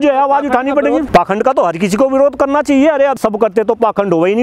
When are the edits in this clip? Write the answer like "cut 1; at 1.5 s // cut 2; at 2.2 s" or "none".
cut 1; at 1.0 s // cut 2; at 3.2 s